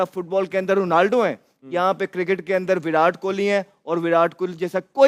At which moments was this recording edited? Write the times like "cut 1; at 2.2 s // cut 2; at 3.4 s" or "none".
none